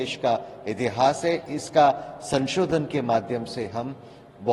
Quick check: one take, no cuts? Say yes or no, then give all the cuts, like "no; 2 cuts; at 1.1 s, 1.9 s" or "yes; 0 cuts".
yes; 0 cuts